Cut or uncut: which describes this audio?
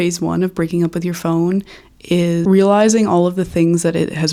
uncut